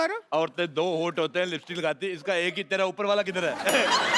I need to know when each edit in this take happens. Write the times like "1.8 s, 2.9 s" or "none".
none